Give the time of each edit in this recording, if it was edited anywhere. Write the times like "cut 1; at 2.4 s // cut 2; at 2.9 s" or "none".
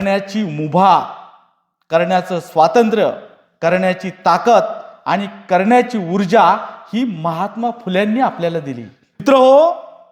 cut 1; at 9.2 s